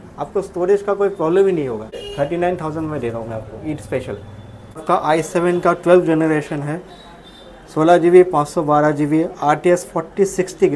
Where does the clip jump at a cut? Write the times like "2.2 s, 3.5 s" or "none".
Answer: 2.0 s, 4.8 s

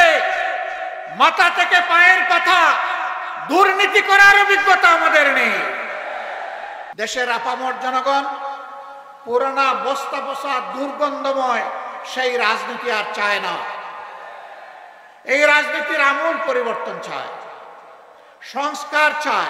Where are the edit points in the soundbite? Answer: 6.9 s

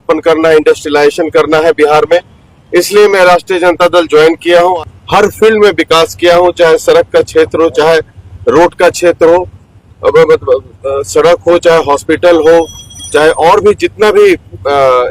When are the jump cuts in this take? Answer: 4.8 s

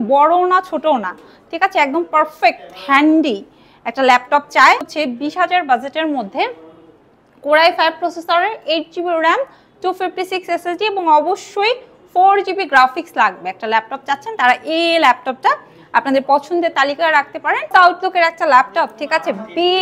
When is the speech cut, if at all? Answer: 4.9 s, 17.7 s

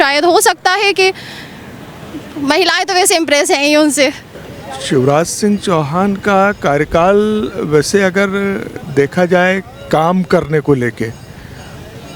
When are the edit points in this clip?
4.3 s

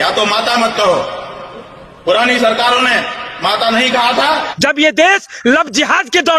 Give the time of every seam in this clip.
4.5 s

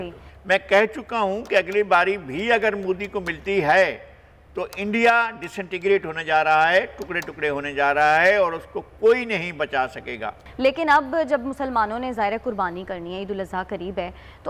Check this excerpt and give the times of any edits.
none

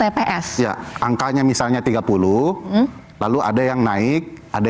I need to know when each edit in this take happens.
none

